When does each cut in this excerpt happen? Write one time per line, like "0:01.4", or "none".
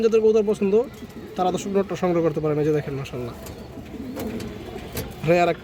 none